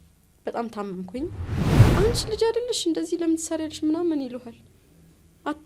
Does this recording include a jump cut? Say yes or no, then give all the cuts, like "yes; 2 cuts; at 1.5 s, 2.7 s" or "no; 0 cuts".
yes; 1 cut; at 1.8 s